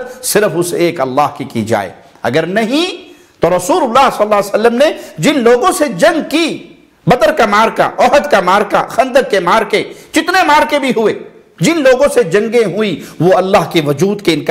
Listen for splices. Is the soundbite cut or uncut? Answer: uncut